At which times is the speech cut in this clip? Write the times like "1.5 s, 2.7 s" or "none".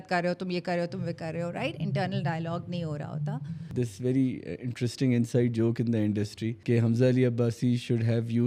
3.7 s, 6.5 s